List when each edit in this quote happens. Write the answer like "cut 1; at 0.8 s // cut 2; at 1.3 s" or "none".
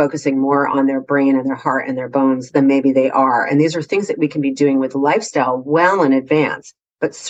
none

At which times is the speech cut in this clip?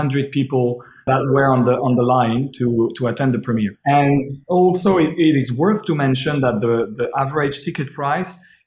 cut 1; at 1.1 s // cut 2; at 3.8 s

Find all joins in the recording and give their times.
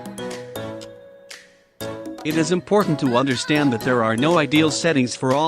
cut 1; at 2.2 s

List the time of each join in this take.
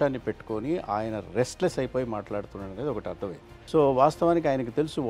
none

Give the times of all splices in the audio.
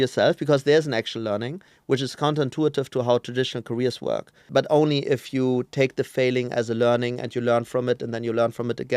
cut 1; at 4.4 s

